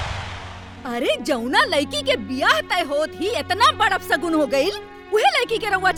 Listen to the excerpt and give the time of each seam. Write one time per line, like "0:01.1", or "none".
none